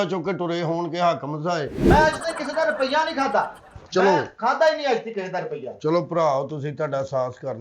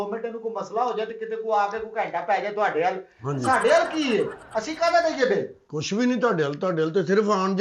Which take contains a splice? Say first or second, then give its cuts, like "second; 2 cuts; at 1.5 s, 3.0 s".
first; 1 cut; at 1.8 s